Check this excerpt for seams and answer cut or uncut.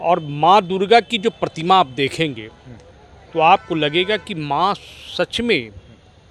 uncut